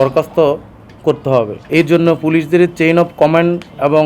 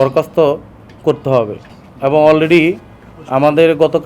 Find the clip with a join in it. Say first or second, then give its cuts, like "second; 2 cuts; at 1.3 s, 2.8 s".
first; 1 cut; at 1.7 s